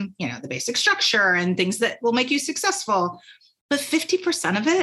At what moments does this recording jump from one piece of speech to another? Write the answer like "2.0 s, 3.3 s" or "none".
none